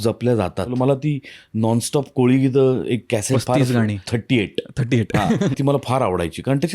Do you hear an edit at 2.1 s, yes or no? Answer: no